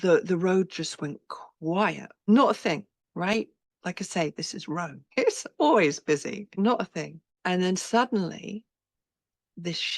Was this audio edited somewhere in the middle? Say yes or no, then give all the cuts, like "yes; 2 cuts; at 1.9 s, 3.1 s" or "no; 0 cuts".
yes; 6 cuts; at 2.3 s, 3.0 s, 3.6 s, 5.0 s, 6.5 s, 7.2 s